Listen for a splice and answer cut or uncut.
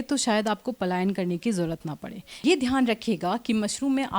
cut